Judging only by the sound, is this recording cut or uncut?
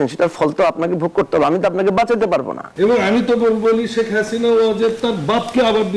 cut